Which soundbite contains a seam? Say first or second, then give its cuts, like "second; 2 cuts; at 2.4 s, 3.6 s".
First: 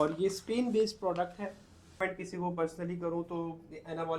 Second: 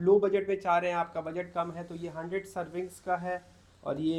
first; 1 cut; at 2.0 s